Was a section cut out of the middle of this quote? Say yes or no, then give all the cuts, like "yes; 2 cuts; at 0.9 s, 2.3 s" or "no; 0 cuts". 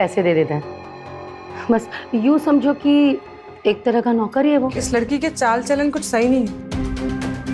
yes; 1 cut; at 4.8 s